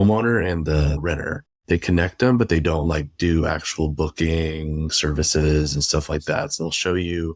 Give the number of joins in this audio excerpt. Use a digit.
2